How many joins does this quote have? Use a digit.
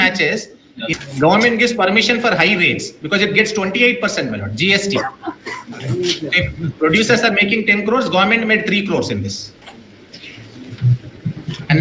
1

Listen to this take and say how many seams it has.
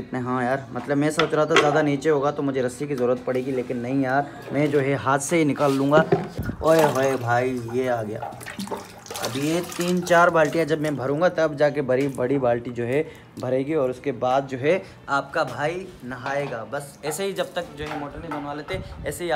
0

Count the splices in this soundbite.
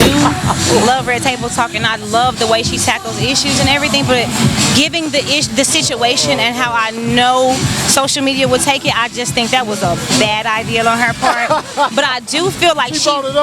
0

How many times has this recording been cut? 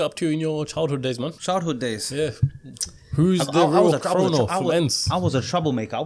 1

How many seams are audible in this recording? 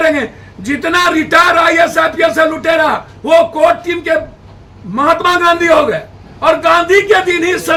0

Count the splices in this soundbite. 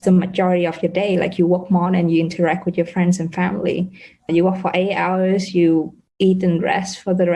1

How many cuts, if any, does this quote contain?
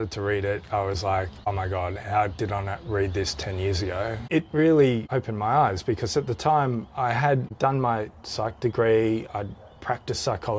1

